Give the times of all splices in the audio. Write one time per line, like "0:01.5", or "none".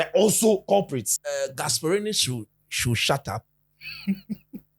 0:01.1